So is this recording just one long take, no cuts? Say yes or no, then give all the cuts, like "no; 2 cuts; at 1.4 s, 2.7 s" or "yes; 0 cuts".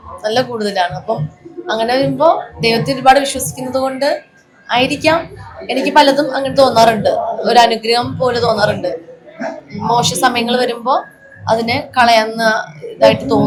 yes; 0 cuts